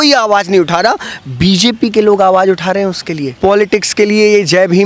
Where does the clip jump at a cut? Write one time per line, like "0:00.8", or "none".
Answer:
0:03.4